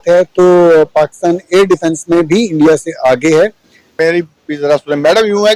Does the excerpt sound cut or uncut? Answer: cut